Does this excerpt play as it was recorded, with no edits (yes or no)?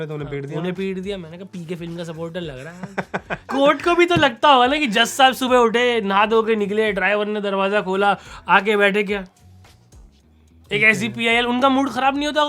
no